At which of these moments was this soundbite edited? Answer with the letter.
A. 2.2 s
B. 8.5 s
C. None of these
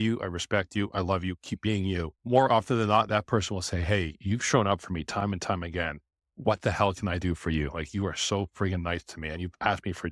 A